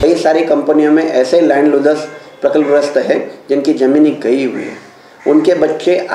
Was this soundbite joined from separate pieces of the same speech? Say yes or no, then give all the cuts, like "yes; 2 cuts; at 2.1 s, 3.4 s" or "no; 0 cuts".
no; 0 cuts